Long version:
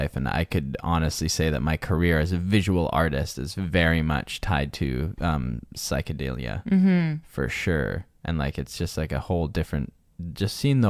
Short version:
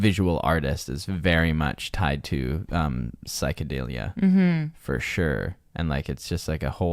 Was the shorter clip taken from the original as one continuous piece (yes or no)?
yes